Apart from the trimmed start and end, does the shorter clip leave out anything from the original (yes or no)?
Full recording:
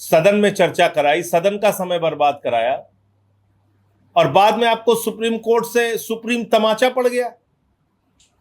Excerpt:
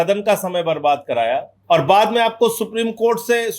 yes